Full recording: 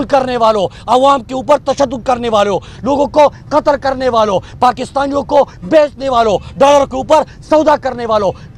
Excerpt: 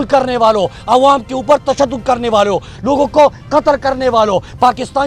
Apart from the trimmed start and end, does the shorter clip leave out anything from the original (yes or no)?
no